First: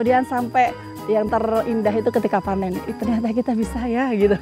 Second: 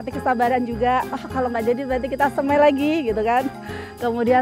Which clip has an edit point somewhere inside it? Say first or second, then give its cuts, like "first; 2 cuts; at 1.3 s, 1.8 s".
first; 1 cut; at 1.3 s